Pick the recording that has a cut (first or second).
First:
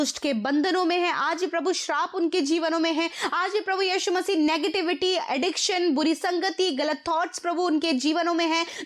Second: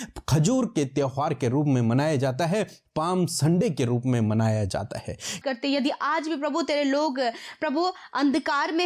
second